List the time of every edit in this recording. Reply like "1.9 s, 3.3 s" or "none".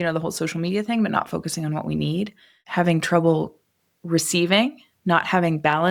none

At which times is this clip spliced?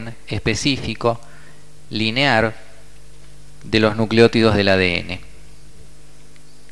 none

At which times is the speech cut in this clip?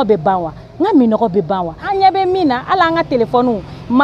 1.8 s

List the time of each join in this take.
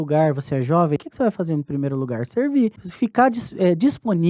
1.0 s, 2.8 s

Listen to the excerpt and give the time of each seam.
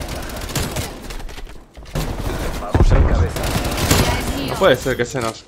1.9 s

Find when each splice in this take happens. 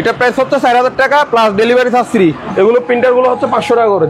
2.5 s

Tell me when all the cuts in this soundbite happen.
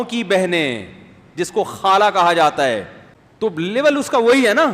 3.7 s

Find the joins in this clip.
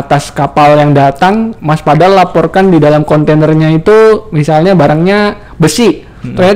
none

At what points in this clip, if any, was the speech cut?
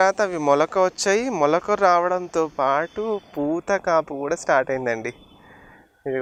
none

